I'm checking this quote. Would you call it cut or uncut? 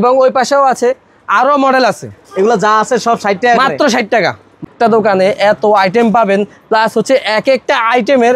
cut